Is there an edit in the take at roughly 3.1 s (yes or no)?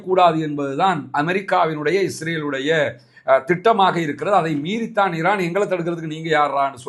no